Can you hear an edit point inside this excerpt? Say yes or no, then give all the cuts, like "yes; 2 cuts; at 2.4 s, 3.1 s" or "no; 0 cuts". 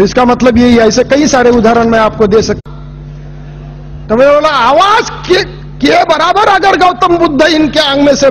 no; 0 cuts